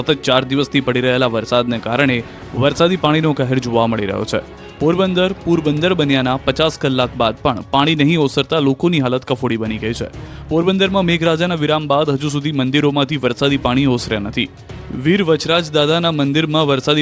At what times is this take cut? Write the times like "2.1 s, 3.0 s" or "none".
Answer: 4.2 s